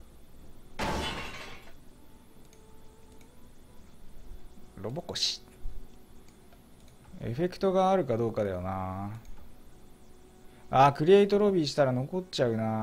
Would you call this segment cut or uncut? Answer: uncut